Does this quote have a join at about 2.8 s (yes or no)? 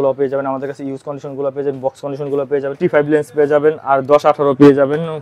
yes